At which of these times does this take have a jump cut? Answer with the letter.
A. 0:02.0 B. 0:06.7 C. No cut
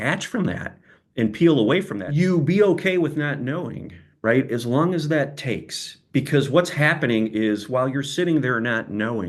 A